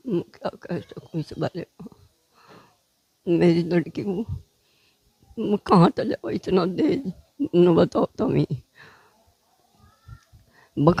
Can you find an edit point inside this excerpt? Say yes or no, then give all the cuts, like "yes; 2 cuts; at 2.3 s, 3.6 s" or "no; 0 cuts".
no; 0 cuts